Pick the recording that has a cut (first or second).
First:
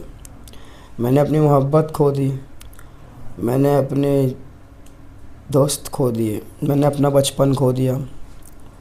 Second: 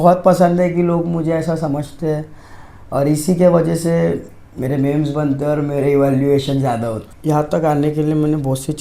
second